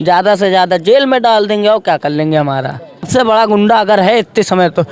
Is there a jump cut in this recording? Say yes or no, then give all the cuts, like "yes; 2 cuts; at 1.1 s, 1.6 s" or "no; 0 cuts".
yes; 1 cut; at 3.1 s